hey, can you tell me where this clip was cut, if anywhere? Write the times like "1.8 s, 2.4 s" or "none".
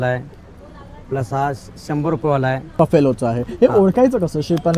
2.8 s